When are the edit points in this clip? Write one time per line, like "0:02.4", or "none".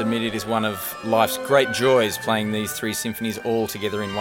none